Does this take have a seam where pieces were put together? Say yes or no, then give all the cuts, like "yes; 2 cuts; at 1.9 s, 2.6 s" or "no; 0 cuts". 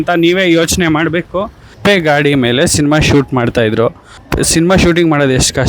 yes; 1 cut; at 1.7 s